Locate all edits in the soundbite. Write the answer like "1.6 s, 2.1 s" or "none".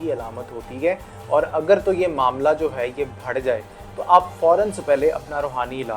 none